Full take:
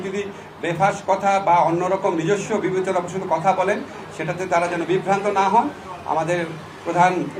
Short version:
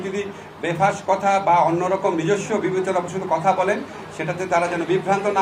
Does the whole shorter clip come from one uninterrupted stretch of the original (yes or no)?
yes